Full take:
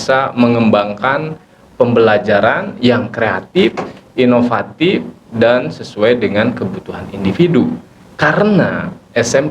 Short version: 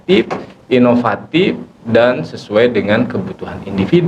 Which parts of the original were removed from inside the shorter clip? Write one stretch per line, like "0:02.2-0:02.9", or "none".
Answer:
none